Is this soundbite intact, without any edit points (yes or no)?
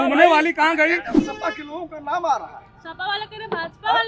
no